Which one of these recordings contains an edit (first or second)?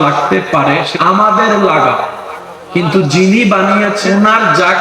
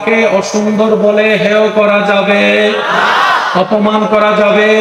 first